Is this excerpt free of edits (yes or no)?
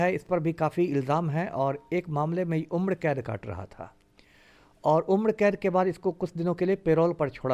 yes